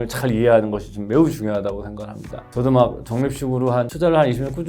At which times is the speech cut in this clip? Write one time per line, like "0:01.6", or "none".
0:02.5
0:03.9